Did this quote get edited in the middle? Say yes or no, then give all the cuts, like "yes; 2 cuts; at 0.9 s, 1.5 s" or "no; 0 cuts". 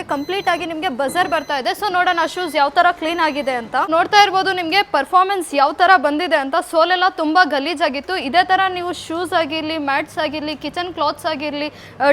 no; 0 cuts